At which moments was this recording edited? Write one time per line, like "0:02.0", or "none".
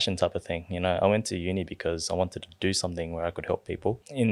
none